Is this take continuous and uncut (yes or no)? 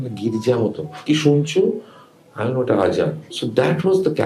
no